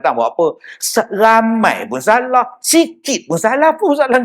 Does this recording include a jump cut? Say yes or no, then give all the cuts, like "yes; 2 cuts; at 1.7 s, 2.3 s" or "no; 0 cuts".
no; 0 cuts